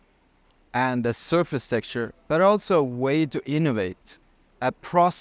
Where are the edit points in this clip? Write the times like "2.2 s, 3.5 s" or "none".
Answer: none